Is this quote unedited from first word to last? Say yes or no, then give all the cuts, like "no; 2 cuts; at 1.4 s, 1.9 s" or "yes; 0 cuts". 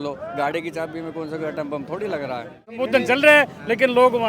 no; 1 cut; at 2.8 s